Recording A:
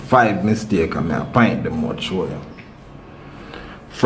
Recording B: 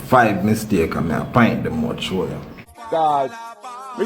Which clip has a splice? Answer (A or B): B